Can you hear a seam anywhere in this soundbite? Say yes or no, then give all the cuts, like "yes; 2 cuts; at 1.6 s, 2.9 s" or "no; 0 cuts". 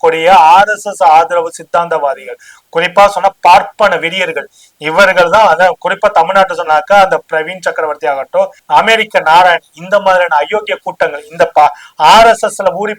no; 0 cuts